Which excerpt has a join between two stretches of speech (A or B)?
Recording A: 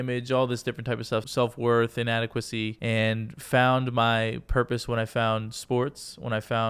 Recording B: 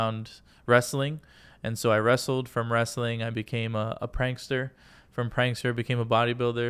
A